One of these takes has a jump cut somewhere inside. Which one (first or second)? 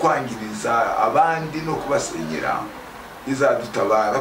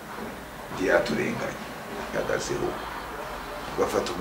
second